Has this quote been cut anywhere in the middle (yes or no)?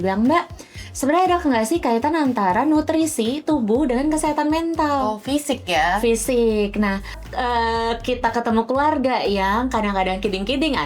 yes